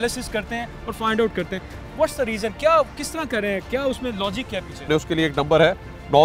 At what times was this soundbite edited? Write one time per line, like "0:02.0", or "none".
0:04.8